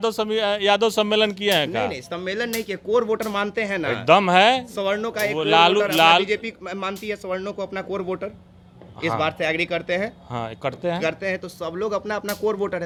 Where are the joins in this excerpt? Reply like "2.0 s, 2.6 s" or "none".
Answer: none